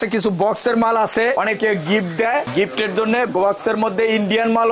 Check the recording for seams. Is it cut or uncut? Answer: uncut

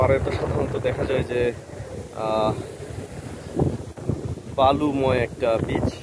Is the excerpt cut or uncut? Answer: uncut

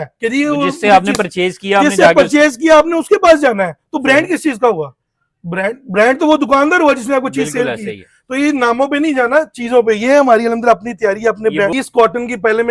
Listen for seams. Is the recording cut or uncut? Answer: cut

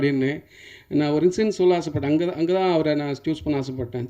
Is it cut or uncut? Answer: uncut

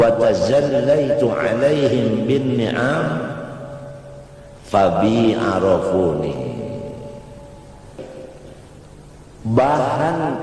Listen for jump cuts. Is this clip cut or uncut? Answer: cut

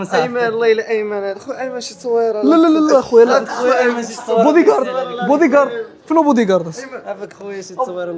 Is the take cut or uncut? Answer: uncut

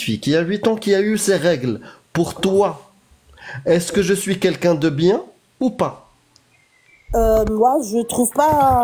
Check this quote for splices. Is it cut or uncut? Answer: uncut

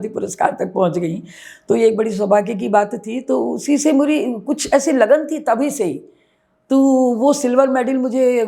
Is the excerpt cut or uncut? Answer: uncut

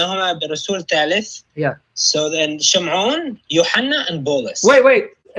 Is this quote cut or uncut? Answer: uncut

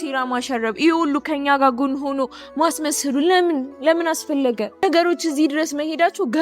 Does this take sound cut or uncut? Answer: cut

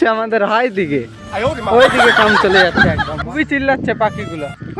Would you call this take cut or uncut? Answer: cut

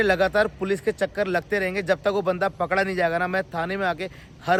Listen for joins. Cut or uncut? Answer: uncut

